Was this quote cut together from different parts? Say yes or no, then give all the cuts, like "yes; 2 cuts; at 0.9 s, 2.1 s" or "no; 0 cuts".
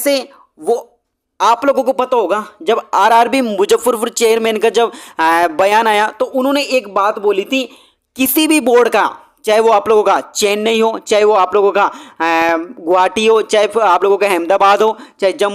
no; 0 cuts